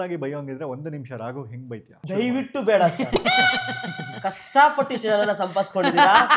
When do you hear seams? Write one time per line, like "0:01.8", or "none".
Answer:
0:01.9